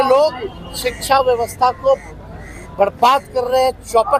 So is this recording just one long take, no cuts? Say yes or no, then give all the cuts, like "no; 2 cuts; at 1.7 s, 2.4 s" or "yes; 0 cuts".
yes; 0 cuts